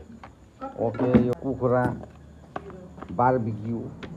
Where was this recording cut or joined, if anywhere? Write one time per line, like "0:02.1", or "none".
0:01.4